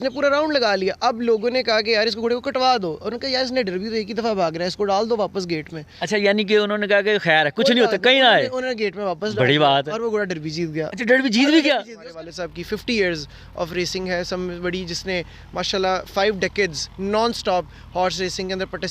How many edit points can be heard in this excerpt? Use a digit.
1